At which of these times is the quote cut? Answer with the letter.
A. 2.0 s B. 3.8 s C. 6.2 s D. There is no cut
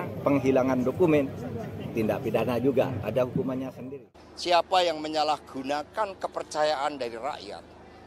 B